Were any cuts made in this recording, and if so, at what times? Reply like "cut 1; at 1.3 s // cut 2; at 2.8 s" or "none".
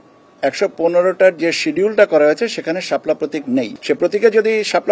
cut 1; at 3.7 s